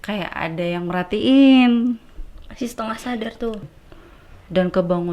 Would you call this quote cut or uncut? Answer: cut